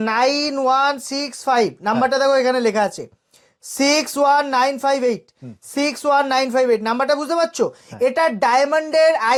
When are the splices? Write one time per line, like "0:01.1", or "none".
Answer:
none